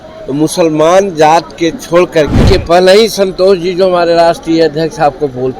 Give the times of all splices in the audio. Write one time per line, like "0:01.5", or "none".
0:02.4